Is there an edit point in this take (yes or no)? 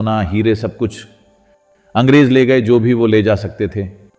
no